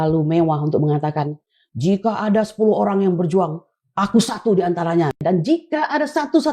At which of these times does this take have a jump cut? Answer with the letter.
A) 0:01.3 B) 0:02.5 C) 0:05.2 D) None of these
C